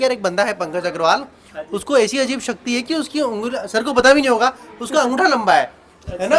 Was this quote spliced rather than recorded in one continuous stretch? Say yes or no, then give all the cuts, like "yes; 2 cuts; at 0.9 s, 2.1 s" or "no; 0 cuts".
no; 0 cuts